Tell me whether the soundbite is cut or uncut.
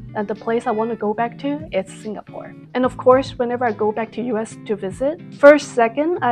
uncut